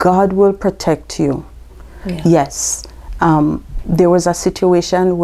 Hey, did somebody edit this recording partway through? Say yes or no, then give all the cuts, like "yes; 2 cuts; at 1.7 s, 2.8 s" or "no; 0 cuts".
no; 0 cuts